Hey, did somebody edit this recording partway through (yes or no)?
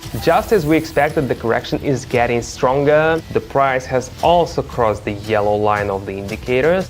yes